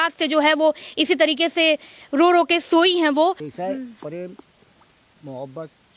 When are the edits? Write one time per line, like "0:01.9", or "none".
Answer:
0:03.4